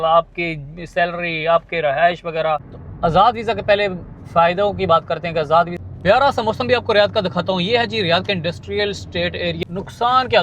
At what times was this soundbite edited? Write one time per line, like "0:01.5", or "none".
0:02.7
0:05.8
0:09.6